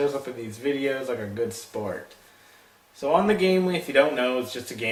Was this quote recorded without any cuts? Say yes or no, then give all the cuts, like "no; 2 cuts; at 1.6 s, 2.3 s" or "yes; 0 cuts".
yes; 0 cuts